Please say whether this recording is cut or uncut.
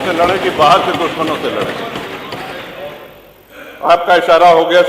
uncut